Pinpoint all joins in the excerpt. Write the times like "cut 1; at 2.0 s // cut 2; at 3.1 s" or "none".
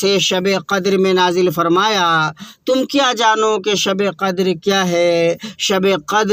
none